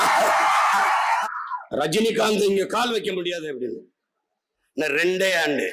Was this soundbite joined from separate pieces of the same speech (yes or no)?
yes